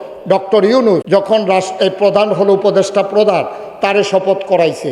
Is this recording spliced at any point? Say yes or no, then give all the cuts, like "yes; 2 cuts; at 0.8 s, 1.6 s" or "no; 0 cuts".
yes; 1 cut; at 1.0 s